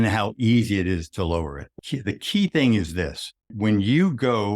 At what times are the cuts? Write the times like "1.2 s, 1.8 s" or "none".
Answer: 1.7 s, 3.5 s